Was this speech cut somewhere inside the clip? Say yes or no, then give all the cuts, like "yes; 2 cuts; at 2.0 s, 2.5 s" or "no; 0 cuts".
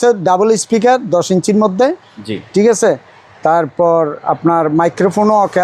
no; 0 cuts